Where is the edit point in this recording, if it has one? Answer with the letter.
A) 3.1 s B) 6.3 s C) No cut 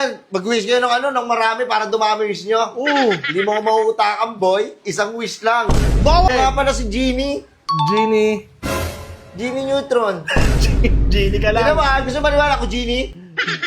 B